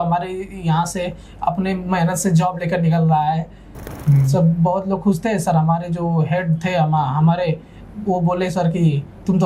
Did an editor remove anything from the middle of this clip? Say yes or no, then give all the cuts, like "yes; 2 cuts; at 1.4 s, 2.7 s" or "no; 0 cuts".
yes; 1 cut; at 3.9 s